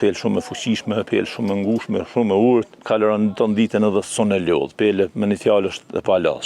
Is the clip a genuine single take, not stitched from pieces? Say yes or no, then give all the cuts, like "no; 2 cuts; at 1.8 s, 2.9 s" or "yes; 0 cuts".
no; 1 cut; at 2.8 s